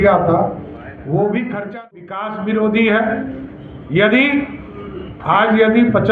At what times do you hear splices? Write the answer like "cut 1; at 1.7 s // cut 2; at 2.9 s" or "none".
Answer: cut 1; at 2.1 s